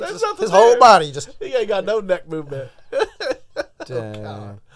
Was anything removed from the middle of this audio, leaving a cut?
no; 0 cuts

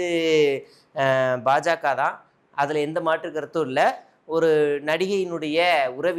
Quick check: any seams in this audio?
no; 0 cuts

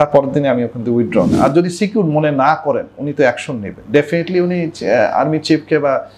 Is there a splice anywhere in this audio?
yes; 1 cut; at 1.3 s

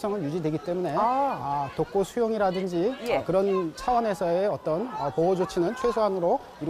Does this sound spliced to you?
no; 0 cuts

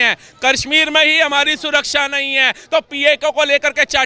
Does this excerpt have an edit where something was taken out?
no; 0 cuts

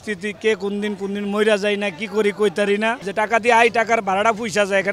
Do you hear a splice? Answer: yes; 1 cut; at 3.0 s

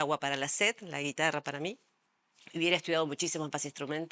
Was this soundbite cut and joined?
no; 0 cuts

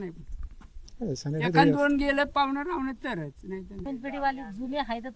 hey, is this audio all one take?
no; 1 cut; at 3.9 s

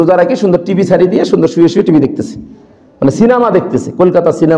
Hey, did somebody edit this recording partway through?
no; 0 cuts

